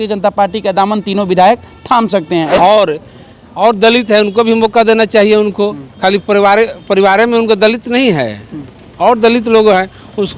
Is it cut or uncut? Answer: cut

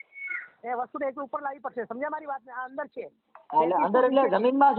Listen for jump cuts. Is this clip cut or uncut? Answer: uncut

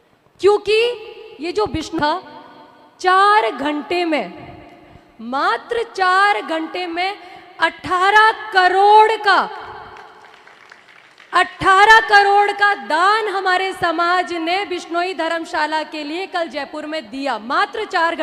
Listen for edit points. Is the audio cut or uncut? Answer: cut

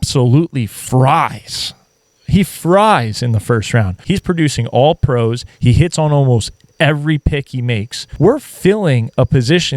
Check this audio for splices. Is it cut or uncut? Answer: cut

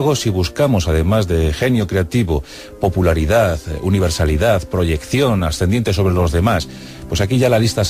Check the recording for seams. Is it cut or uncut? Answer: uncut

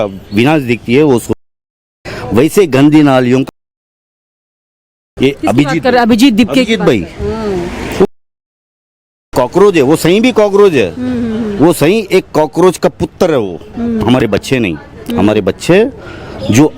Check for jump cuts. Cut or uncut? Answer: uncut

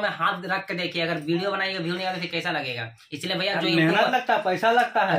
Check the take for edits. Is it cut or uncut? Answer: uncut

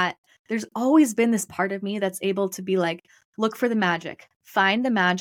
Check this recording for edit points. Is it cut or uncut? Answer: uncut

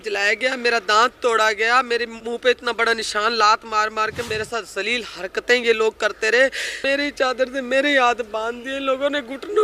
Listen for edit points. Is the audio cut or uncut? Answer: cut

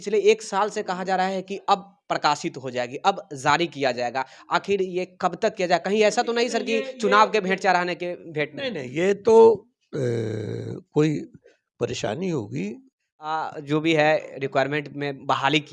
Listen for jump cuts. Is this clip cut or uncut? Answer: cut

